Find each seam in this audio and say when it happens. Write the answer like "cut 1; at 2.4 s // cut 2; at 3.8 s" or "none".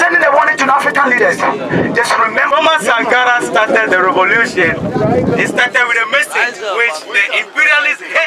cut 1; at 2.5 s